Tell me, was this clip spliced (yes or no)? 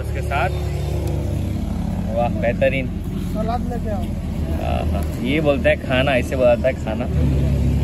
no